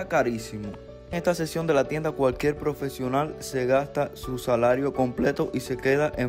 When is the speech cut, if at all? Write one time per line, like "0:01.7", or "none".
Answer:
0:01.1